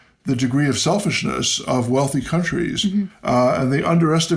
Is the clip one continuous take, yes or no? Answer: yes